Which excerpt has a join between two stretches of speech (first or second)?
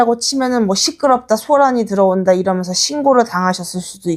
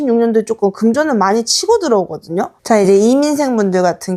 second